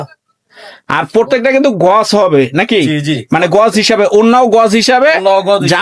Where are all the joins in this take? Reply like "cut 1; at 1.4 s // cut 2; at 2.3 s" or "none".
none